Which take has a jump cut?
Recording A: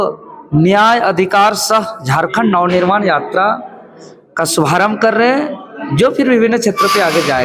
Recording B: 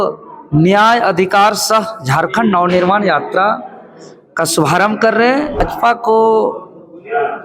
B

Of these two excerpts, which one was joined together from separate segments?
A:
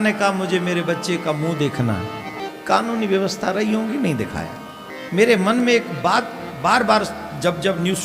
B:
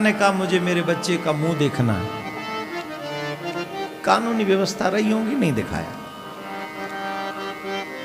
A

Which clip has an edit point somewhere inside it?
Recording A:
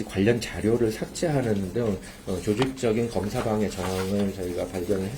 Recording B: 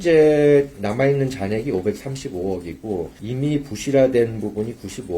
B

